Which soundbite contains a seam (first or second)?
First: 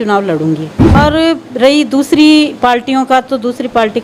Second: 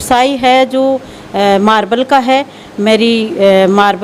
first